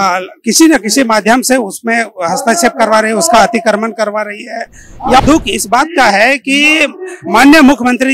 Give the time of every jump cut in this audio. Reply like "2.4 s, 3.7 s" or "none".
5.2 s